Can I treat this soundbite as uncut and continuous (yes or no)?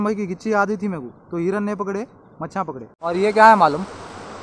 no